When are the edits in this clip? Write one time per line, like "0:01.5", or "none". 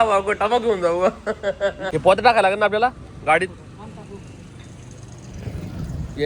0:01.9